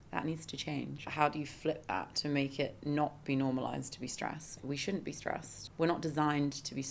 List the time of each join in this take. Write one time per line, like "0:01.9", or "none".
0:01.0
0:04.6
0:05.6